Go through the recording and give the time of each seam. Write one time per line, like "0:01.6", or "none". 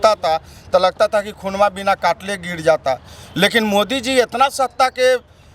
none